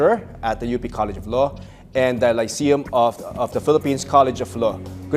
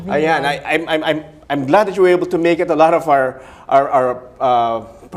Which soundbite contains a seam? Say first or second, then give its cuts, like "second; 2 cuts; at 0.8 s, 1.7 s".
first; 1 cut; at 4.2 s